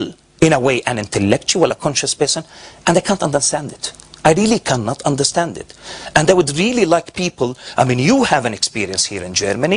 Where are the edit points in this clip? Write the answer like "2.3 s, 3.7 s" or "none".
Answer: none